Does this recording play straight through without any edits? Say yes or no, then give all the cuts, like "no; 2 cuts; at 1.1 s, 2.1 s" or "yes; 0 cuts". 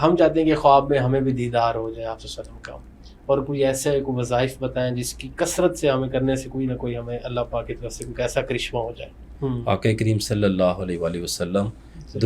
no; 1 cut; at 9.2 s